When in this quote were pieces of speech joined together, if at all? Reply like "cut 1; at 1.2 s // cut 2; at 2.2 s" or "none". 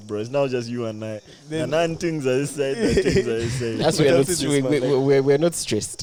none

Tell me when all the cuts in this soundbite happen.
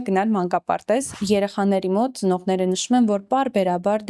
cut 1; at 1.1 s

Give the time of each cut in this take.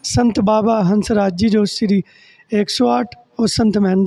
none

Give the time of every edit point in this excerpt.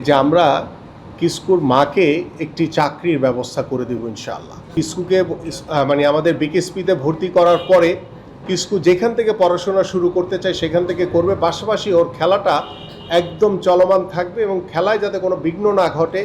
cut 1; at 4.7 s

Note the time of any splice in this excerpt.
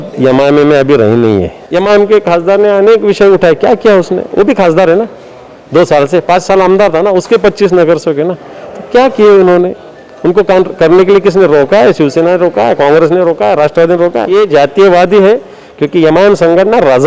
cut 1; at 1.6 s // cut 2; at 14.3 s

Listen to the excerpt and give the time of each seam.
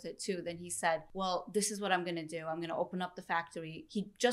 cut 1; at 1.1 s

